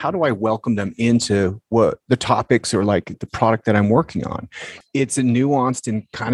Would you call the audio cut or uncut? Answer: cut